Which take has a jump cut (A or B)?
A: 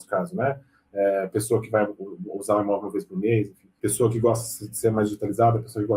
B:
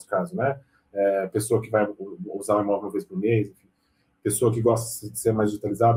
A